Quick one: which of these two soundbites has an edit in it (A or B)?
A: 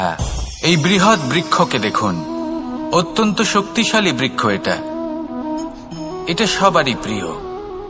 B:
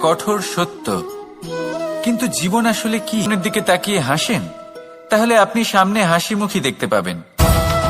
B